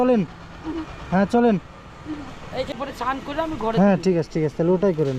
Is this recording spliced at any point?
yes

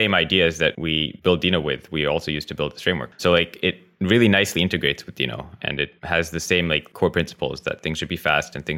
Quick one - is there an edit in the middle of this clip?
yes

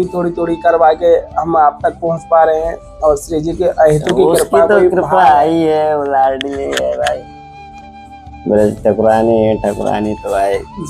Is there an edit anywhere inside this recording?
no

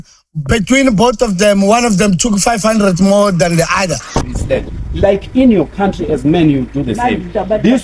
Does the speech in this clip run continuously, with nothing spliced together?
no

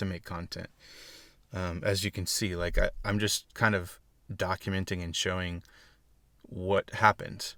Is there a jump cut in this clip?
no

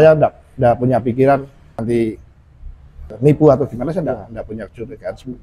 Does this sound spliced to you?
yes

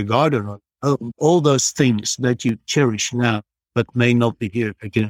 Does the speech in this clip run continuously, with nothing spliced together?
no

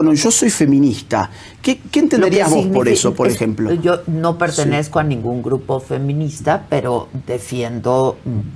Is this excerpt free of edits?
yes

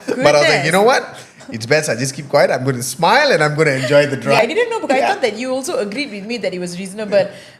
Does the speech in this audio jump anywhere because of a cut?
yes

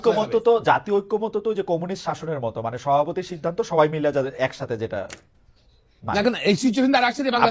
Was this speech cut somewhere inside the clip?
no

